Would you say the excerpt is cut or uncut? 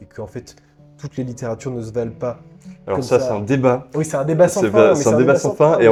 uncut